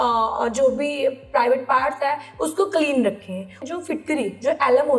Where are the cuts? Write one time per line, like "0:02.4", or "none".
0:03.7